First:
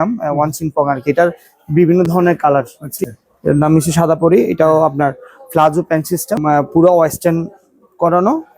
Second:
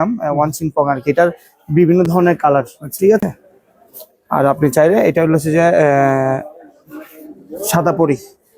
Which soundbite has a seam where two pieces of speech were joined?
first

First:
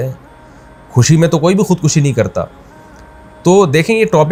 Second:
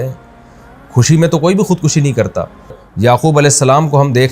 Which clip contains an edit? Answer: second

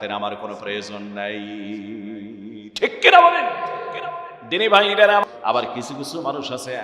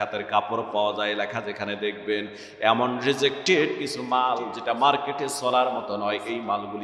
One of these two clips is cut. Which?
first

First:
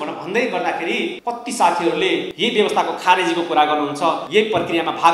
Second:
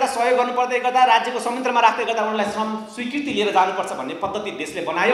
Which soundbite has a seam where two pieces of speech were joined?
first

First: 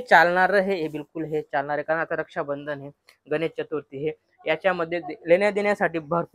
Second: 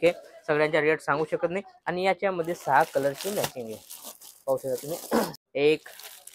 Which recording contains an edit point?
second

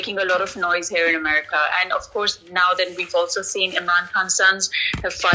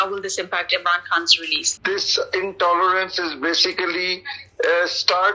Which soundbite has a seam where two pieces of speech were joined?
second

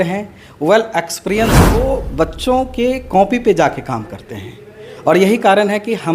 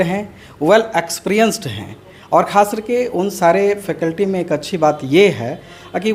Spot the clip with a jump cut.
first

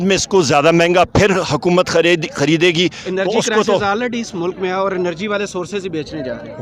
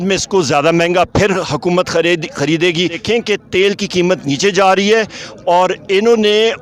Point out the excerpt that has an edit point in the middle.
second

